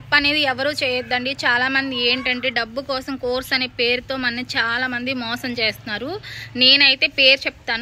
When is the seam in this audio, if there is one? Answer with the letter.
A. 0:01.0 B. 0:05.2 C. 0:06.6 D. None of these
D